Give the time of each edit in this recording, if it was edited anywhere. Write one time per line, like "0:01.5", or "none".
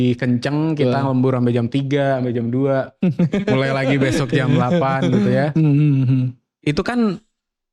none